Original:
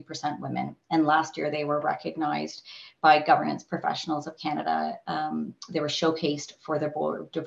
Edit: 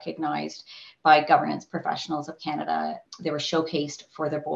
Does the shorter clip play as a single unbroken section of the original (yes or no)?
no